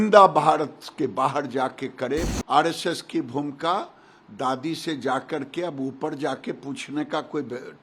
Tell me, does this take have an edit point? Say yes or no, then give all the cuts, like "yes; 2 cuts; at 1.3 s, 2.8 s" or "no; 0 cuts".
yes; 1 cut; at 2.3 s